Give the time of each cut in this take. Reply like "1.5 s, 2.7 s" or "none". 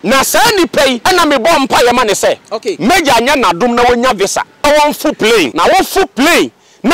1.0 s, 4.6 s, 5.5 s